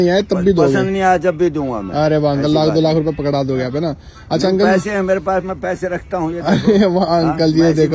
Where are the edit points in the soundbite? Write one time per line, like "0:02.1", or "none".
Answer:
none